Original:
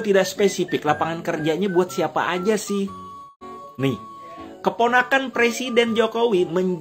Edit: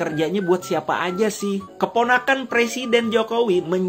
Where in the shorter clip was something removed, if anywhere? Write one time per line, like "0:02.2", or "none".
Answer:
0:01.7